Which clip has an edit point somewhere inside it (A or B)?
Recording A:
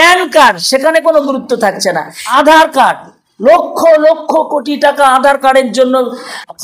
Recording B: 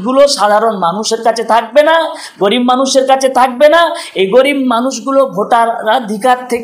A